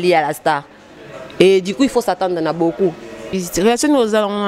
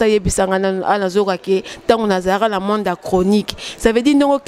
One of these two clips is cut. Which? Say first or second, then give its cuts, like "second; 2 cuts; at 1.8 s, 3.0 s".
first; 1 cut; at 3.3 s